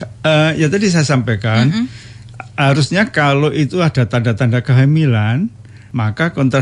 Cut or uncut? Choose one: uncut